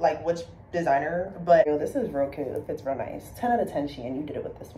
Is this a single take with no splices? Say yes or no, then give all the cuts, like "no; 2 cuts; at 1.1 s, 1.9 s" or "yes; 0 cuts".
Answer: no; 1 cut; at 1.6 s